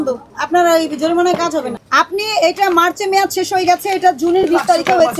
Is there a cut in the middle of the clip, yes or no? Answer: yes